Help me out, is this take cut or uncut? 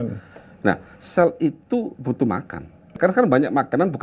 cut